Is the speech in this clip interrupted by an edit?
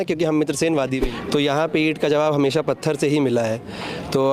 yes; 1 cut; at 1.0 s

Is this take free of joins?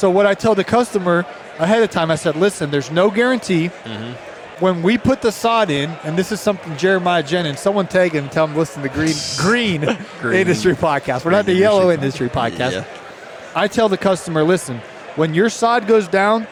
yes; 0 cuts

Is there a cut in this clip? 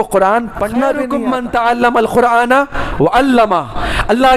yes; 1 cut; at 1.1 s

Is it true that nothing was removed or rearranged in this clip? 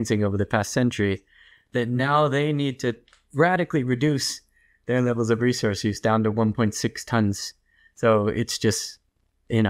yes; 0 cuts

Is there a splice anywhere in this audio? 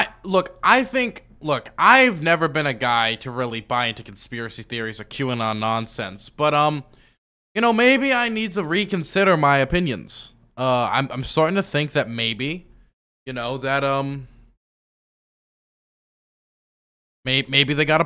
no; 0 cuts

